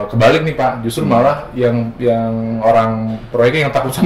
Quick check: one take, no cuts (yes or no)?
yes